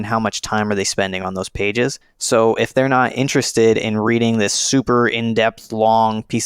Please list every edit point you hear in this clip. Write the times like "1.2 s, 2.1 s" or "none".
2.1 s